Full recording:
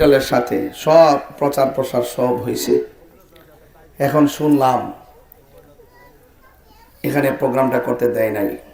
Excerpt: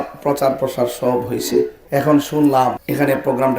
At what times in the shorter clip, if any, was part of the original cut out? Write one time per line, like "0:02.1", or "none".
0:01.8
0:02.8